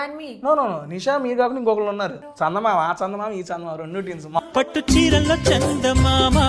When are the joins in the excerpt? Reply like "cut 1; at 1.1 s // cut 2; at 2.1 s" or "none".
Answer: cut 1; at 2.2 s // cut 2; at 4.4 s